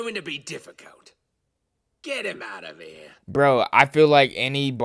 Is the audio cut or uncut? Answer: uncut